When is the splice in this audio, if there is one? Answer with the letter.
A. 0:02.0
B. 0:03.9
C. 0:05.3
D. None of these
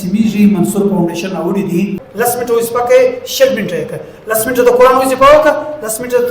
A